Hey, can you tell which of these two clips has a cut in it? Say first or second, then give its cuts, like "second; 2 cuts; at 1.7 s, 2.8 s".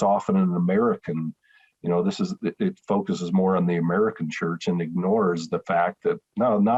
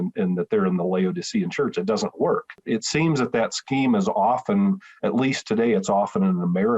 second; 1 cut; at 2.6 s